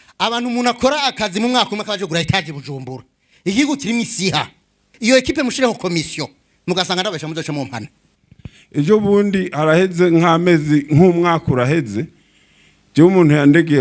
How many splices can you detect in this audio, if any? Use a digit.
2